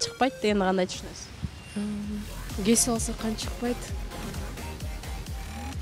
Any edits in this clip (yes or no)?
no